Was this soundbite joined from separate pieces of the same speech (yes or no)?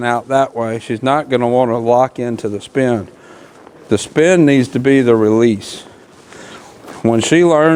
no